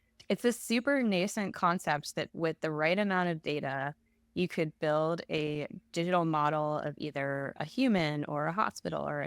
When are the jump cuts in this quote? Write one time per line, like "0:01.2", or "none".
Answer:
0:02.3